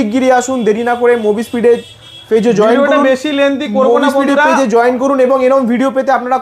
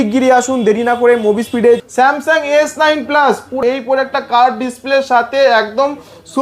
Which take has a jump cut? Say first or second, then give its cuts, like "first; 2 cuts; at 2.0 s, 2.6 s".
second; 2 cuts; at 1.9 s, 3.5 s